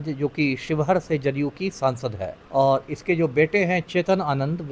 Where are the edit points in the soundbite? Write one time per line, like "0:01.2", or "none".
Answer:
0:02.3